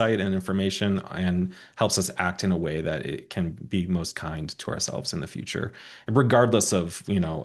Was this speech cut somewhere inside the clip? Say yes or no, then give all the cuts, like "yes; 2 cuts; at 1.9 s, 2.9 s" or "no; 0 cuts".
no; 0 cuts